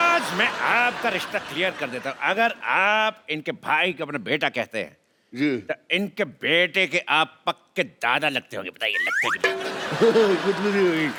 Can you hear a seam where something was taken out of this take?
no; 0 cuts

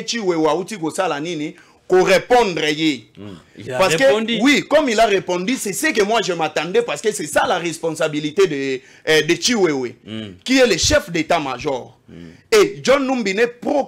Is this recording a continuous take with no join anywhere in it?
yes; 0 cuts

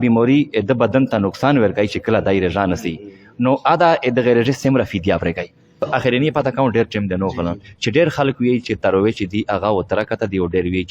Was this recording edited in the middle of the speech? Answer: yes; 1 cut; at 5.9 s

